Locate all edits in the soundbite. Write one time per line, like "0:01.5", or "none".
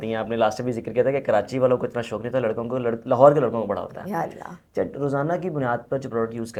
none